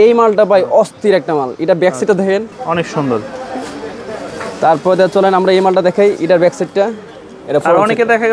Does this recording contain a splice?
no; 0 cuts

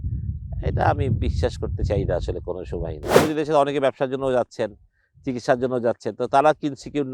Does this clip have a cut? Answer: yes; 1 cut; at 3.2 s

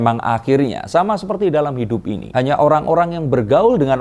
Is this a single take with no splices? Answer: no; 1 cut; at 2.2 s

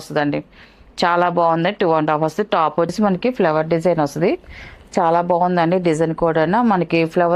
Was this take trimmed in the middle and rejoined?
yes; 1 cut; at 2.9 s

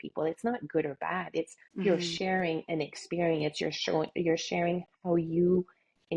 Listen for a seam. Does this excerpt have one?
no; 0 cuts

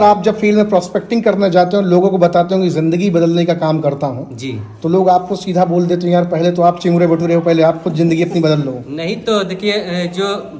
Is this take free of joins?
yes; 0 cuts

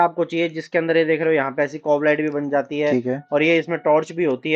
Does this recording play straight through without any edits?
yes; 0 cuts

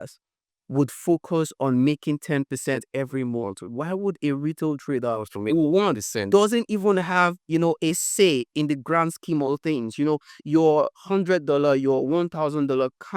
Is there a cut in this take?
no; 0 cuts

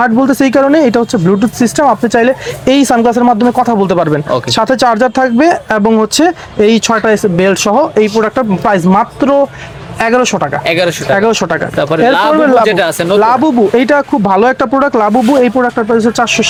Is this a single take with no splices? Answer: yes; 0 cuts

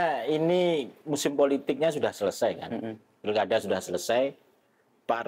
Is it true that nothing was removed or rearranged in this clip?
yes; 0 cuts

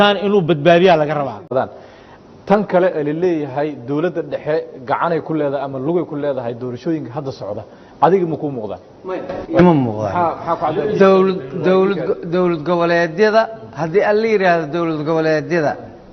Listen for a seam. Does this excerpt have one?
yes; 1 cut; at 1.5 s

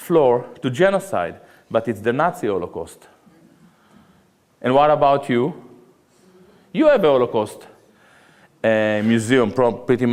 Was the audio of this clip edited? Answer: no; 0 cuts

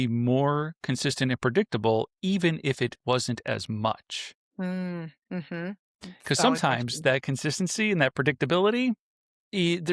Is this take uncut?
yes; 0 cuts

